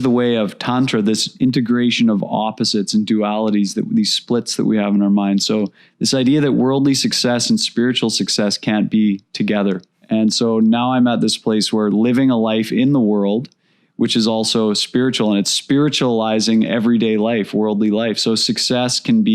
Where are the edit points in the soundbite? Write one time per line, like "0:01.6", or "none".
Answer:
0:01.3
0:09.9